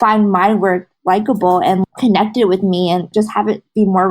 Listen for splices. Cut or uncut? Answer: cut